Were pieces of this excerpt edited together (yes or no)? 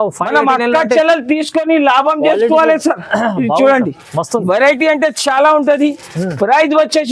no